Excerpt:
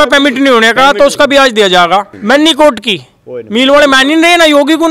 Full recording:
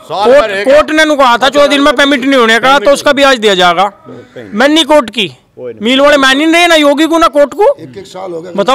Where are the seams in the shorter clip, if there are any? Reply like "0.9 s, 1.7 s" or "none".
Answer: 2.1 s